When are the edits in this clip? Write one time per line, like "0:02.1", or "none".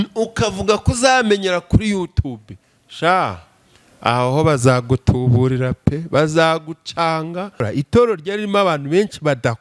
0:07.7